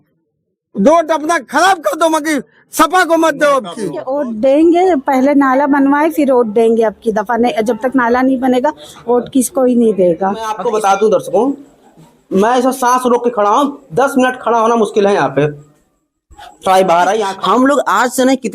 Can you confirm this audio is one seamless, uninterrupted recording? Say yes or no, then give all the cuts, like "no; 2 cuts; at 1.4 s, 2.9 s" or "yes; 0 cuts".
no; 3 cuts; at 4.1 s, 10.6 s, 17.3 s